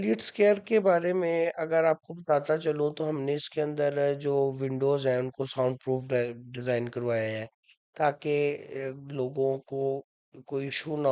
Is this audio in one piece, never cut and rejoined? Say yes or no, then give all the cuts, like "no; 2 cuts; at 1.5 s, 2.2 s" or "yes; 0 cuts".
yes; 0 cuts